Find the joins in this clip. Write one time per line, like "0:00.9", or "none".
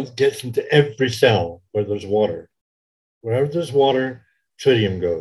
none